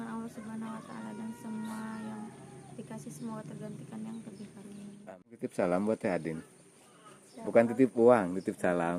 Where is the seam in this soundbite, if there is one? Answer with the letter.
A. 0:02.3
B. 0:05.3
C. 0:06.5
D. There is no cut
B